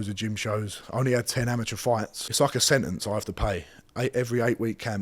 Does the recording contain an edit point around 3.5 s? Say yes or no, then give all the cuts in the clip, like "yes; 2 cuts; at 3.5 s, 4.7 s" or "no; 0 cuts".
no; 1 cut; at 2.2 s